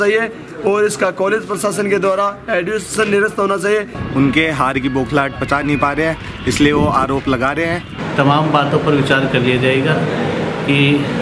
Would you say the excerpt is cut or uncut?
cut